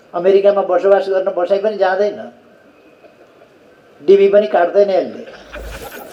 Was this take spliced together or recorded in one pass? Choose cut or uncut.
uncut